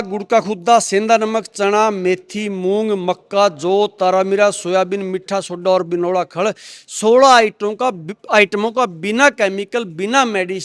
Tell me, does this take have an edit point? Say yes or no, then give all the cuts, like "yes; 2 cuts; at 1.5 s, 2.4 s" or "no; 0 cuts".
no; 0 cuts